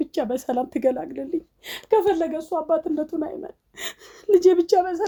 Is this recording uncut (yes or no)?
yes